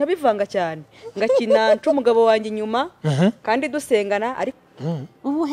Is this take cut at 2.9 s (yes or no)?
no